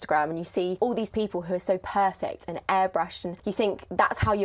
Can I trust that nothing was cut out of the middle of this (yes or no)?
no